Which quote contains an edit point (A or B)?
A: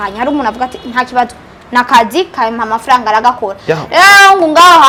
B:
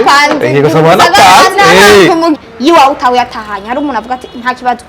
B